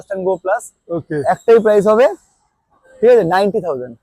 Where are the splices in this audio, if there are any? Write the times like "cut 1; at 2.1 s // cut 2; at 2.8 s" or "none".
none